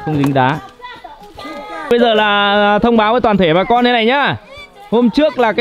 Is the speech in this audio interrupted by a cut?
yes; 1 cut; at 1.9 s

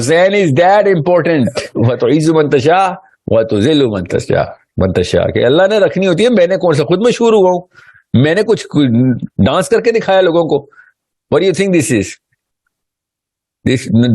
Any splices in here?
yes; 1 cut; at 1.6 s

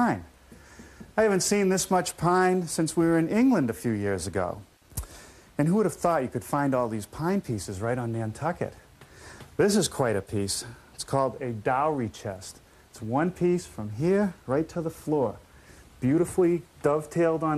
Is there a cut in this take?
yes; 1 cut; at 3.7 s

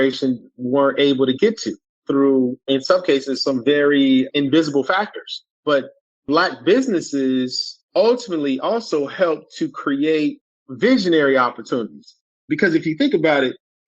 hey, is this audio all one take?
no; 1 cut; at 12.3 s

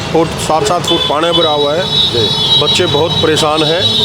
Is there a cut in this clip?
no; 0 cuts

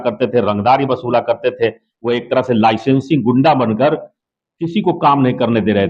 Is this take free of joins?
yes; 0 cuts

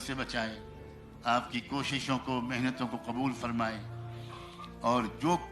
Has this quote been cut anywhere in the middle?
no; 0 cuts

